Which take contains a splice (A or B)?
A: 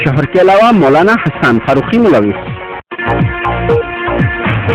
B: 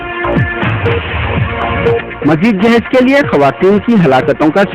B